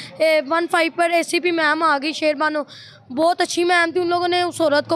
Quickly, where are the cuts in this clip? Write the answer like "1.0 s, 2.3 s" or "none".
none